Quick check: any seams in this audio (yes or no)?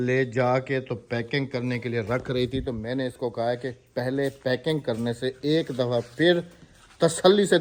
no